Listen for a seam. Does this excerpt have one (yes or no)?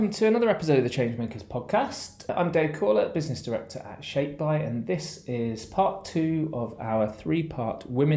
no